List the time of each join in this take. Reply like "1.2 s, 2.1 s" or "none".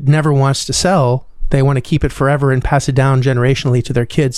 1.3 s